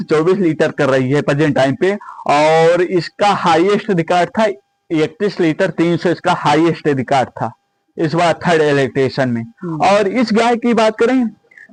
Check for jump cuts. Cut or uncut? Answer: uncut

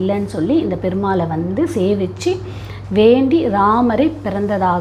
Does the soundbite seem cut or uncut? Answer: uncut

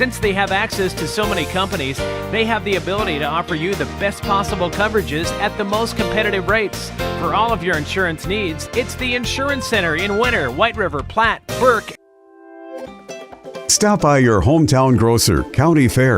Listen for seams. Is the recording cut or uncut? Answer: cut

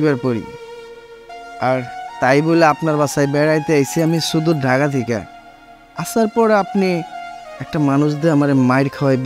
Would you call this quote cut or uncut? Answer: uncut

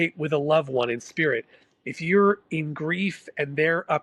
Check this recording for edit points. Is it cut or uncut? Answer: uncut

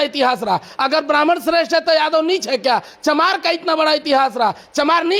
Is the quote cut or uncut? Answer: uncut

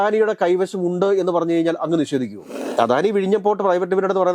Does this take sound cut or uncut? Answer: cut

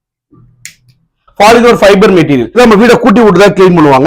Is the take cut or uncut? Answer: cut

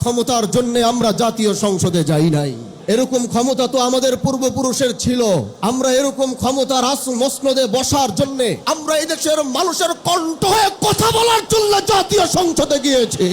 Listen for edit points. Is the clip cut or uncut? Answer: cut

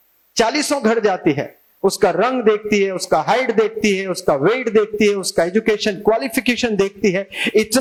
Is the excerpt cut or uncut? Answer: uncut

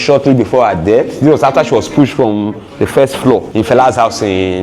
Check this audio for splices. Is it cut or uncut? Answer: uncut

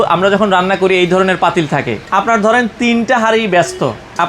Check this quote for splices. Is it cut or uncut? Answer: cut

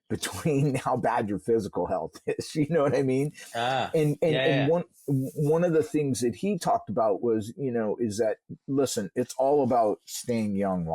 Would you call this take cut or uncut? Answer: uncut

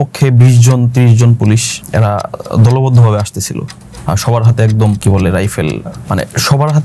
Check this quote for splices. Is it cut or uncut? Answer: cut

